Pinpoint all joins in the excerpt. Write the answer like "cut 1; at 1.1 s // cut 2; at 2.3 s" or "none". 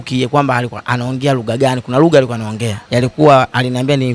cut 1; at 2.8 s